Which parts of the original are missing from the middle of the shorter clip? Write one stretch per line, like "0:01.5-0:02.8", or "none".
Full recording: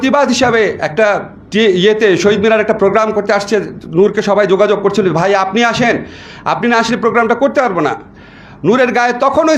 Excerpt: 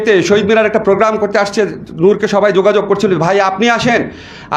none